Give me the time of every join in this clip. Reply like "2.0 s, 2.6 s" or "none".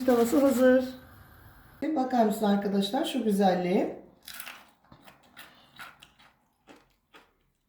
1.7 s